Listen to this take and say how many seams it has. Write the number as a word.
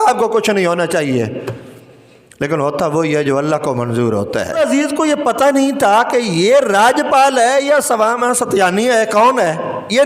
one